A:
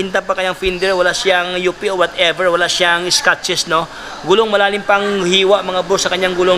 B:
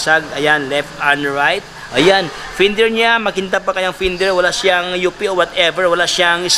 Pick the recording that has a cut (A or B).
B